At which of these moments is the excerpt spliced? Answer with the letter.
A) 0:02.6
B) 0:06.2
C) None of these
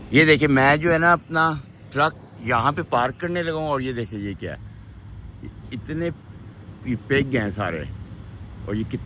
C